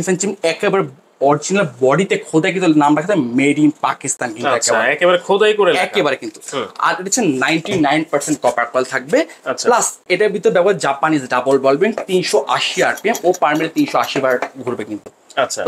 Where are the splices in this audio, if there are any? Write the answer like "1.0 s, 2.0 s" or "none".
none